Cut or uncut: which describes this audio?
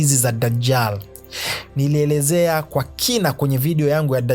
uncut